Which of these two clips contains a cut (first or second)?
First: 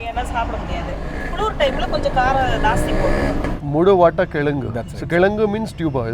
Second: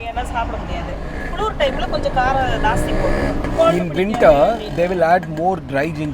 first